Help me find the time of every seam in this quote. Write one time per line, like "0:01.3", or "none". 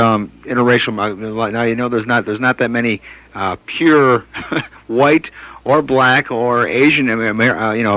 0:03.1